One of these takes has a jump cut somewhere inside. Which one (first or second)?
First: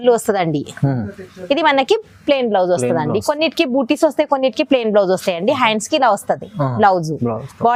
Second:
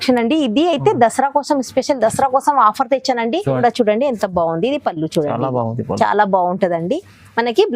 second